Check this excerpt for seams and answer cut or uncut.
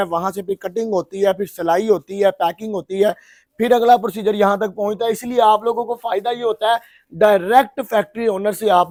uncut